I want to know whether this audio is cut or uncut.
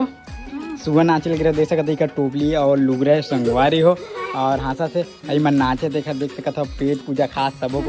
uncut